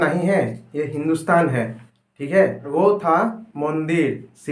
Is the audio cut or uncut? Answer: cut